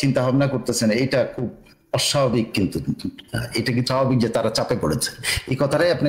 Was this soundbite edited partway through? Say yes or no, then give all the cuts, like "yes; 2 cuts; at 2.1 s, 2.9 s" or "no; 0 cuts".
no; 0 cuts